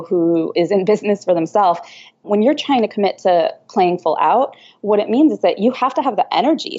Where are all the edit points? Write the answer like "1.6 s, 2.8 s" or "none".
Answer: 2.2 s

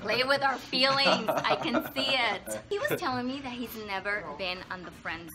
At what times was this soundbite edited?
2.7 s

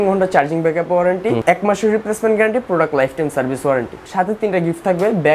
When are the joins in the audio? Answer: 1.4 s, 4.0 s

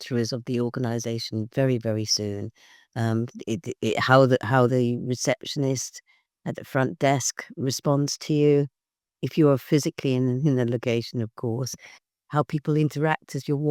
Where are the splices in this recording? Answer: none

